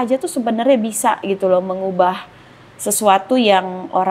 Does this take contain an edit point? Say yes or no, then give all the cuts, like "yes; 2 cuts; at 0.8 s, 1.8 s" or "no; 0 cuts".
no; 0 cuts